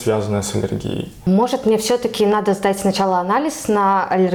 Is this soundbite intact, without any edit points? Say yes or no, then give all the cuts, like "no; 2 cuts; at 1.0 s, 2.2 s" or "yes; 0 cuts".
yes; 0 cuts